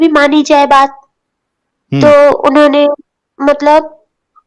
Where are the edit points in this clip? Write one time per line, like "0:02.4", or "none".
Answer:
none